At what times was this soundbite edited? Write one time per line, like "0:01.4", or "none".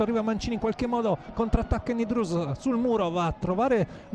none